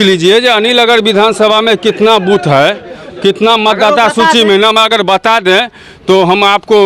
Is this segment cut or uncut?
uncut